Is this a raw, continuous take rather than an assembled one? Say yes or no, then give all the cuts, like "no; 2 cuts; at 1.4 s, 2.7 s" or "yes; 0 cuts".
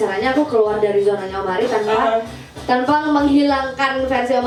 yes; 0 cuts